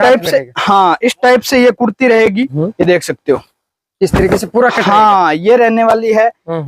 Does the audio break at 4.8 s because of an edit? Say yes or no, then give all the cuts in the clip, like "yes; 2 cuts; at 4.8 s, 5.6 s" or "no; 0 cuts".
no; 1 cut; at 2.6 s